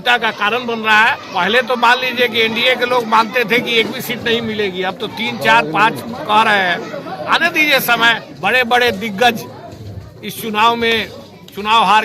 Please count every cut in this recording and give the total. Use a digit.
2